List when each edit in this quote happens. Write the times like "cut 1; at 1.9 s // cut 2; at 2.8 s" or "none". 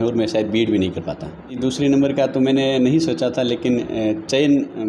cut 1; at 1.6 s